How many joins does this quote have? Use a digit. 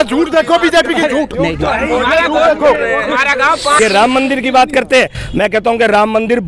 1